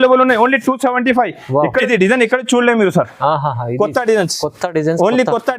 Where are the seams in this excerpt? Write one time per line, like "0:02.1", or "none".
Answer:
0:01.9